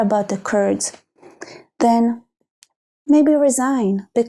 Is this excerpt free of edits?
yes; 0 cuts

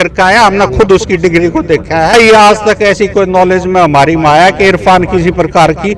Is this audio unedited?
no; 1 cut; at 2.1 s

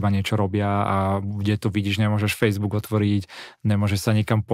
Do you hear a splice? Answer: no; 0 cuts

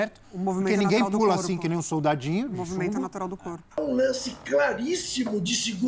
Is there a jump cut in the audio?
yes; 1 cut; at 3.8 s

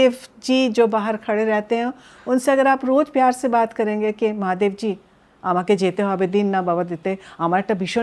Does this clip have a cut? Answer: no; 0 cuts

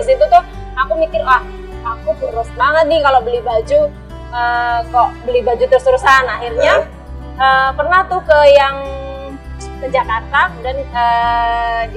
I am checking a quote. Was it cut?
no; 0 cuts

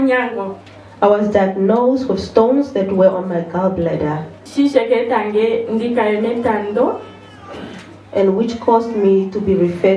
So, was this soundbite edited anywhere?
yes; 1 cut; at 4.4 s

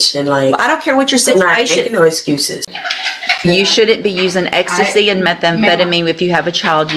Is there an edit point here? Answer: yes; 1 cut; at 2.7 s

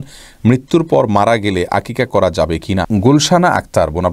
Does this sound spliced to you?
yes; 1 cut; at 2.9 s

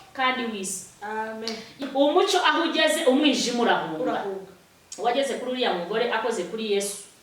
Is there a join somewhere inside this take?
yes; 1 cut; at 1.8 s

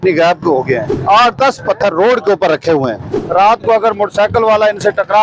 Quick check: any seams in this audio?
yes; 2 cuts; at 0.9 s, 3.2 s

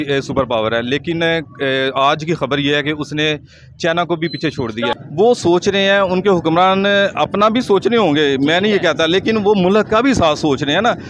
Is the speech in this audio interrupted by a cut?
yes; 1 cut; at 4.9 s

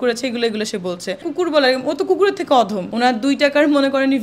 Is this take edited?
yes; 2 cuts; at 1.2 s, 2.8 s

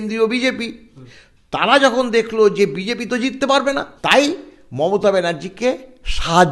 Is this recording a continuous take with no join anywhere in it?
no; 2 cuts; at 1.0 s, 3.9 s

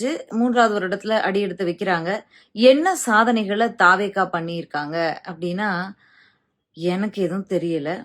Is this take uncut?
yes; 0 cuts

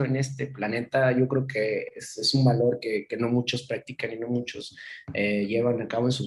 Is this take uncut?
yes; 0 cuts

